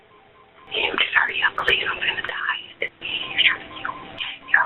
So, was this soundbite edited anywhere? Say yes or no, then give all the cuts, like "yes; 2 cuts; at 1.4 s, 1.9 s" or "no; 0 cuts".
no; 0 cuts